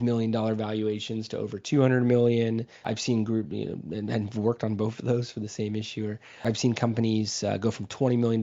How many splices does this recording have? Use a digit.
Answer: 2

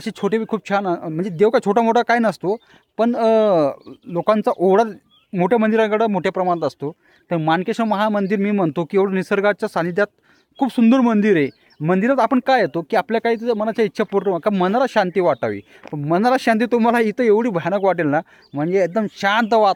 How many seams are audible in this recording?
0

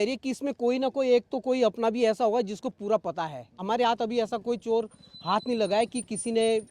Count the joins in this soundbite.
1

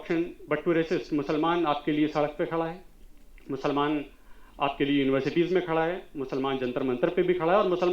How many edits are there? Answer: 0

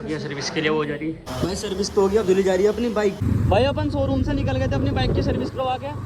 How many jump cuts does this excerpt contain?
0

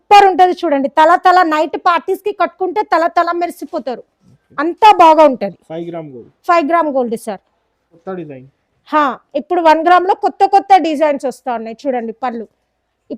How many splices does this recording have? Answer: 1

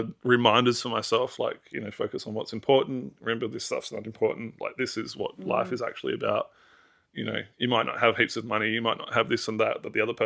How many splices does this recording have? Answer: 0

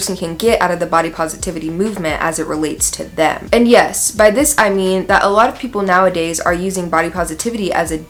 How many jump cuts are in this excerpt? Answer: 0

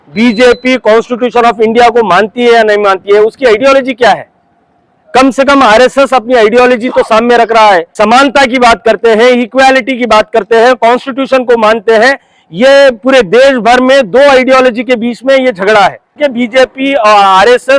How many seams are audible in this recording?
2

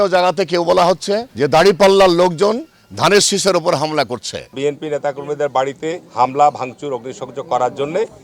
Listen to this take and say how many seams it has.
2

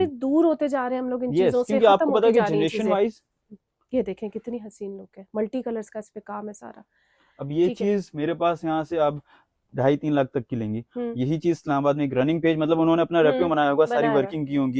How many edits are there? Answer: 0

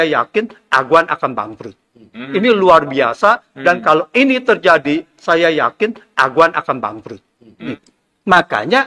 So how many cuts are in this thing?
2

